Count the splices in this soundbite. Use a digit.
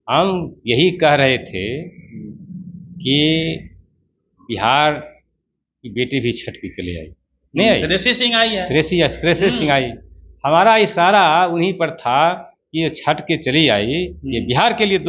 0